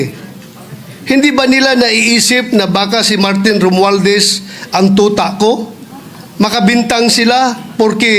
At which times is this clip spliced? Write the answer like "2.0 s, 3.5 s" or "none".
none